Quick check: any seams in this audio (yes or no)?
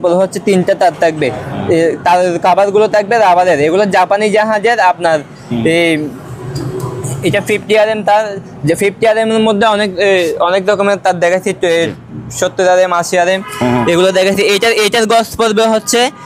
no